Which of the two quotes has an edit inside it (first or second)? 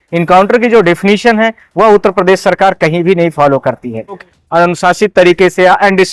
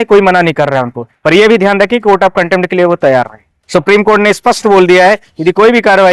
first